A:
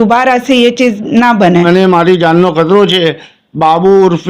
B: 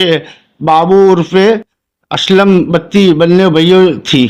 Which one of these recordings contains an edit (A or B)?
A